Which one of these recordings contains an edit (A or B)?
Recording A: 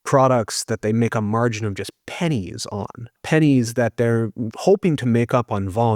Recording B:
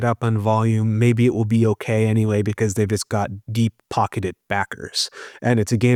A